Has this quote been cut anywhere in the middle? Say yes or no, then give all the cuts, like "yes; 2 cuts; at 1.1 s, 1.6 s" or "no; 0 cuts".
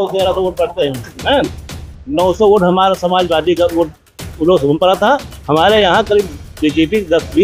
no; 0 cuts